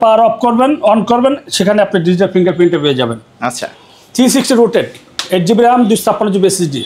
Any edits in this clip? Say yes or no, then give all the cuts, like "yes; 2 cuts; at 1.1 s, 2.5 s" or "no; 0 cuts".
no; 0 cuts